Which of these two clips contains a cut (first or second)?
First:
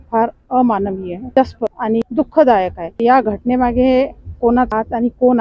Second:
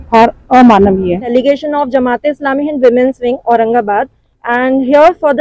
second